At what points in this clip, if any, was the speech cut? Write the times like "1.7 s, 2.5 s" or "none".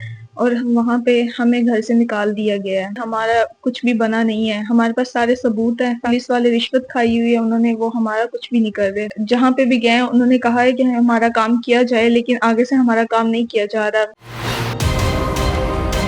3.0 s, 6.0 s, 9.1 s, 14.1 s

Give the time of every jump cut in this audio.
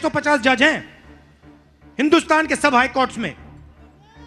none

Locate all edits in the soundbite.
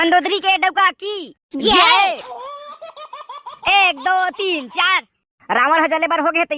none

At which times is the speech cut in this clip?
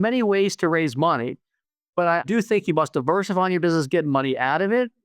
2.2 s

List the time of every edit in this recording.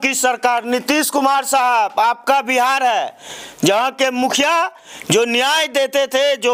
none

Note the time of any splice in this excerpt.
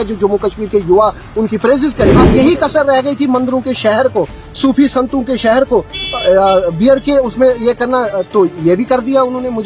2.2 s

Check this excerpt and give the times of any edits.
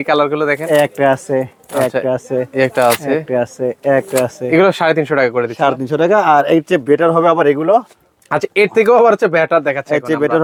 none

